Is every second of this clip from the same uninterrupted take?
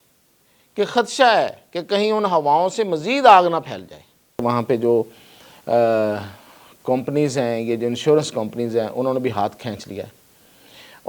no; 1 cut; at 4.4 s

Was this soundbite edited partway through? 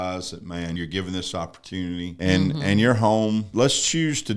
yes; 3 cuts; at 0.8 s, 2.1 s, 3.5 s

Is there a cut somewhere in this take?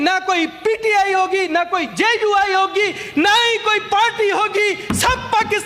no; 0 cuts

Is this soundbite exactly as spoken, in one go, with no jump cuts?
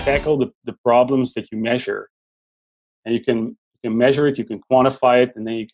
yes; 0 cuts

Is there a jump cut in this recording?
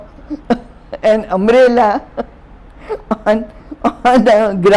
no; 0 cuts

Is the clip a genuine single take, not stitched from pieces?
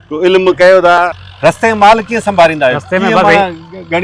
no; 1 cut; at 1.2 s

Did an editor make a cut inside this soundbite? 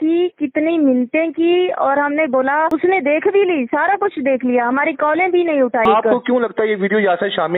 yes; 2 cuts; at 2.7 s, 5.9 s

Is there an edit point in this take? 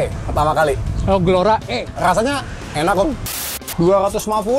yes; 1 cut; at 3.4 s

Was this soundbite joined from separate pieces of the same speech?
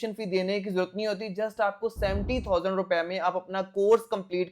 no; 0 cuts

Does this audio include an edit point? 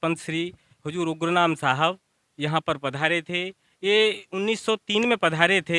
no; 0 cuts

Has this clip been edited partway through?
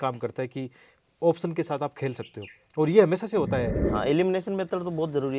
yes; 1 cut; at 3.8 s

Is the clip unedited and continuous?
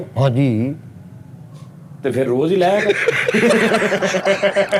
yes; 0 cuts

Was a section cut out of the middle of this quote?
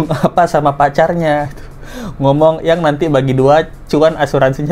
no; 0 cuts

